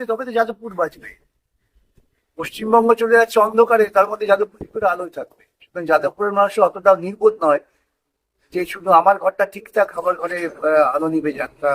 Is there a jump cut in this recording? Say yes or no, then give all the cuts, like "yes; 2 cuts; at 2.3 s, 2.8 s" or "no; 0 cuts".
no; 0 cuts